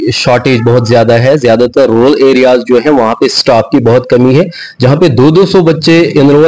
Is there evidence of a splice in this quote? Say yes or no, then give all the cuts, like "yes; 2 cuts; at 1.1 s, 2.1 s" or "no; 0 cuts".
no; 0 cuts